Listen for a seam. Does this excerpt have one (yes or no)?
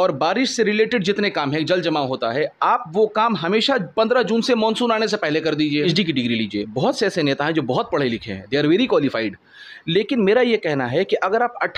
yes